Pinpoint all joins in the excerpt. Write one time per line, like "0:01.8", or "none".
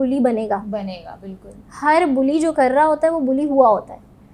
none